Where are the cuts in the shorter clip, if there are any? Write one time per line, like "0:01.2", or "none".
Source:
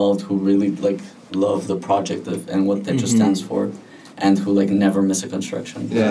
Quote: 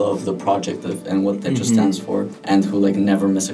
0:02.3